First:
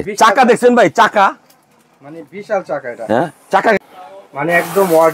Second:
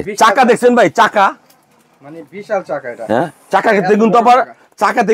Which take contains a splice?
first; 1 cut; at 3.8 s

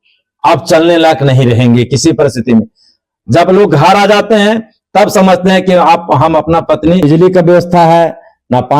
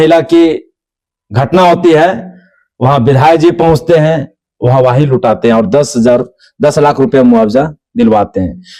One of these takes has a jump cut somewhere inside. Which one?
first; 1 cut; at 7.0 s

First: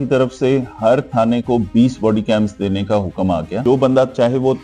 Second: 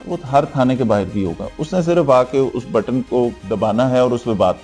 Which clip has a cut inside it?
first; 1 cut; at 3.5 s

